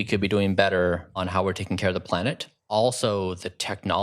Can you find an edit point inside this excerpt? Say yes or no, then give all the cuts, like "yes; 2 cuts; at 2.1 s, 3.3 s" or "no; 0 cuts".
yes; 2 cuts; at 1.2 s, 2.5 s